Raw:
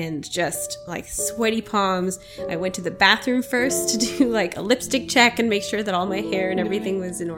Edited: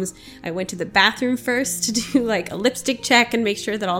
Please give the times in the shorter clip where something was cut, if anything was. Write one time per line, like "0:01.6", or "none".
none